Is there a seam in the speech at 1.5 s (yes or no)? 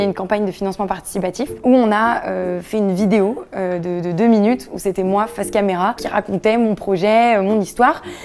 yes